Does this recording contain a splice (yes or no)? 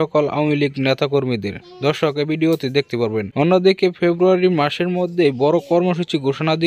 yes